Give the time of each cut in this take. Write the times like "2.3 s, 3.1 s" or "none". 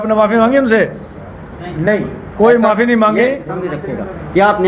3.7 s